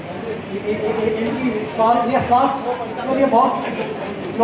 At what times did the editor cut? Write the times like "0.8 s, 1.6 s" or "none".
none